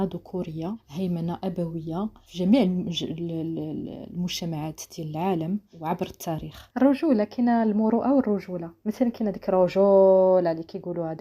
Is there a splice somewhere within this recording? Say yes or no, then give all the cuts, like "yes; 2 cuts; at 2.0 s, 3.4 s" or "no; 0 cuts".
yes; 4 cuts; at 0.8 s, 2.2 s, 5.7 s, 6.6 s